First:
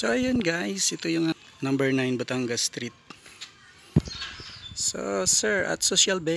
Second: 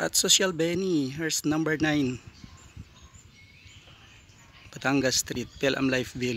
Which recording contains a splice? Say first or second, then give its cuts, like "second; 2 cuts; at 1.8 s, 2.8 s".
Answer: first; 1 cut; at 1.3 s